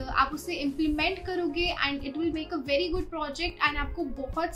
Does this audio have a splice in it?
no; 0 cuts

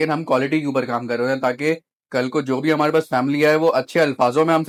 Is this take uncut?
yes; 0 cuts

